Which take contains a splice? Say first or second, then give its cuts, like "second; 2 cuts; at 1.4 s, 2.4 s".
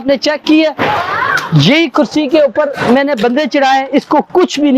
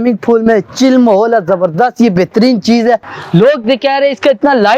second; 1 cut; at 3.1 s